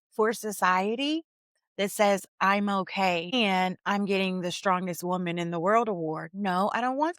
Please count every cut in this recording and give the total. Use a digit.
1